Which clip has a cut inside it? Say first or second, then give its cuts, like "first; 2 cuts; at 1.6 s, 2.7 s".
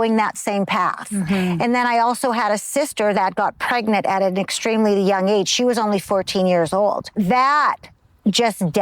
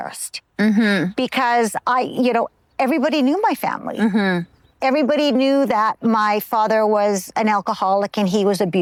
first; 1 cut; at 7.1 s